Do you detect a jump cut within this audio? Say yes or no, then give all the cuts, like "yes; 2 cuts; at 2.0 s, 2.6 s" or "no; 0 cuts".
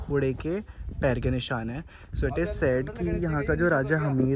no; 0 cuts